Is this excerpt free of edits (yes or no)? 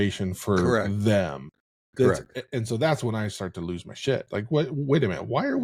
yes